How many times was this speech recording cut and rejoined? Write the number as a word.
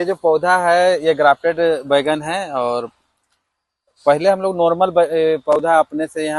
zero